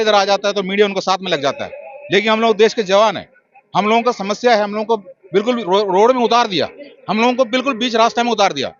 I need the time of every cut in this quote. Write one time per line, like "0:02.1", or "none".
none